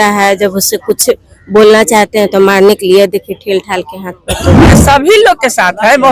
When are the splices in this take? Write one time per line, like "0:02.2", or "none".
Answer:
0:04.8